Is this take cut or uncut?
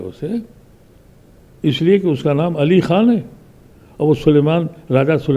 uncut